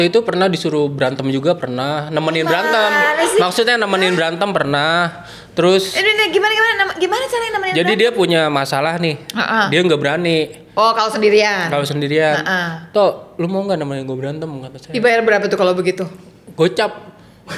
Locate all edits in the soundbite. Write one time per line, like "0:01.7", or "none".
none